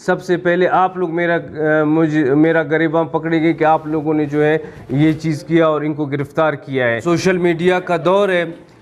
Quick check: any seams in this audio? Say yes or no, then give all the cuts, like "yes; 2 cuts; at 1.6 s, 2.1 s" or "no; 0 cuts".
yes; 1 cut; at 7.0 s